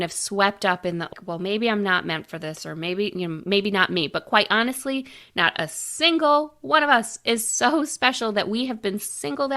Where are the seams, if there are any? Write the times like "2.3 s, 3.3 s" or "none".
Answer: 1.1 s